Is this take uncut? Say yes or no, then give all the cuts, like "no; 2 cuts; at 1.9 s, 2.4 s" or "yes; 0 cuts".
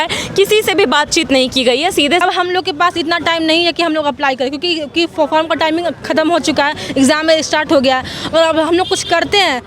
no; 1 cut; at 2.2 s